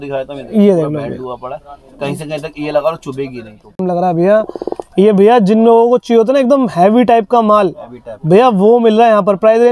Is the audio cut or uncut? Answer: cut